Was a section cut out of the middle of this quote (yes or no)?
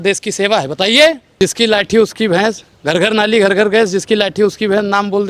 yes